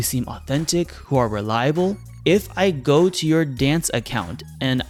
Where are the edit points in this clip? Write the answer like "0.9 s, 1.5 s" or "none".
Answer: none